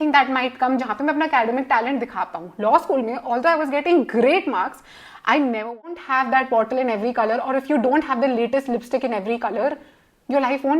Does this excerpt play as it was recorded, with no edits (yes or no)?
no